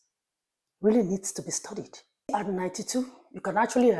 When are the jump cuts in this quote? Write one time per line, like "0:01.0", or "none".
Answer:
0:02.3